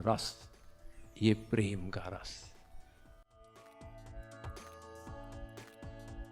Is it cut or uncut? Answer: uncut